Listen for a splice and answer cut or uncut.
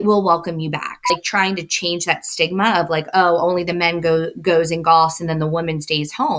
cut